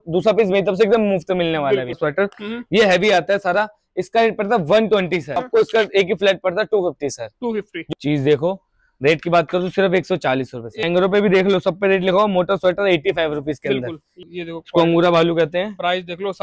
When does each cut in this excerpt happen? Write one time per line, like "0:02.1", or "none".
0:02.0
0:05.5
0:07.9
0:10.8
0:14.1